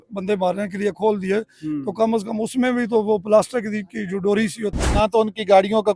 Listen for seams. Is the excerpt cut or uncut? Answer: cut